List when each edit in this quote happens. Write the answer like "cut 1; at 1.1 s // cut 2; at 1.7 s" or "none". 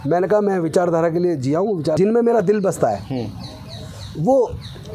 cut 1; at 2.0 s